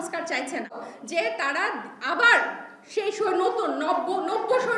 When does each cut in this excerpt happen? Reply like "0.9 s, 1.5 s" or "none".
0.9 s

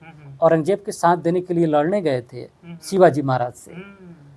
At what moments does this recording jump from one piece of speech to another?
none

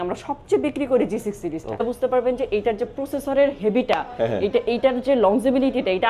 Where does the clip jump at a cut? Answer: 1.8 s

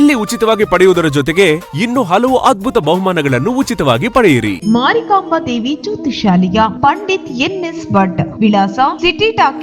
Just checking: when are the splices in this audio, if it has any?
4.6 s

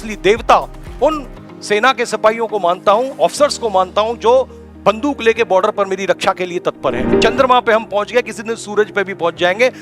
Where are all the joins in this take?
7.1 s

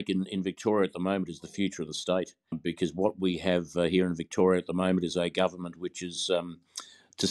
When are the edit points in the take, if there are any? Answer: 2.6 s

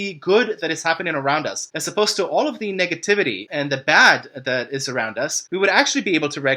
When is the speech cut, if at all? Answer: none

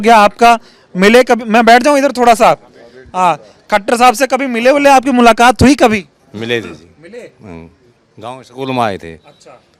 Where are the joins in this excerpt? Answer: none

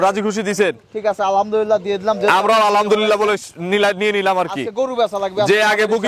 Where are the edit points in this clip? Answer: none

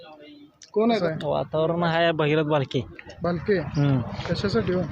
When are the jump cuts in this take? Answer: 1.0 s

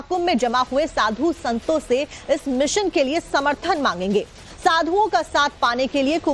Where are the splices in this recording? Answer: 3.3 s

